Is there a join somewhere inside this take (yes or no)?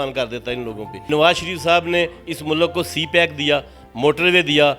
yes